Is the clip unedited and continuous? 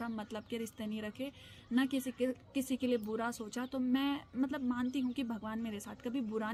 yes; 0 cuts

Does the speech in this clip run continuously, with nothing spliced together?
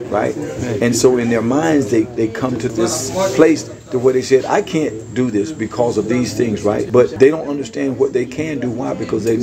no; 2 cuts; at 2.7 s, 7.0 s

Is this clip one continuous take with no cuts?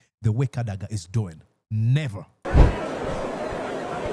no; 1 cut; at 2.4 s

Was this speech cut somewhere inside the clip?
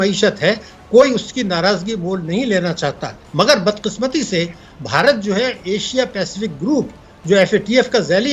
no; 0 cuts

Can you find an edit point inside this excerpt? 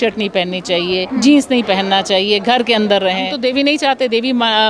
yes; 2 cuts; at 1.1 s, 3.3 s

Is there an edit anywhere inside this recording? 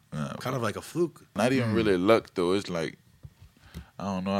yes; 1 cut; at 1.3 s

